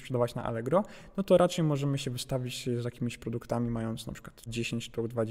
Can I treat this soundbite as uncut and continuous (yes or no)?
yes